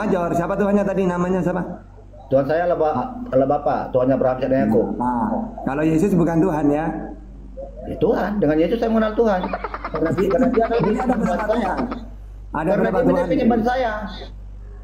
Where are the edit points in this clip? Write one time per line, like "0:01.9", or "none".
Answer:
none